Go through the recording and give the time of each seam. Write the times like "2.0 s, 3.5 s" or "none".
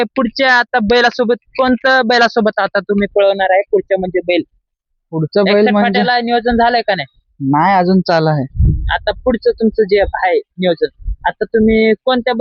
none